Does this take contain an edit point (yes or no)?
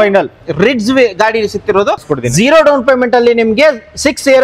yes